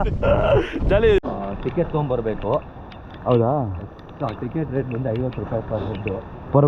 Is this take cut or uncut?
cut